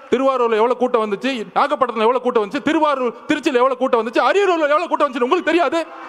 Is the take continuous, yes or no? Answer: yes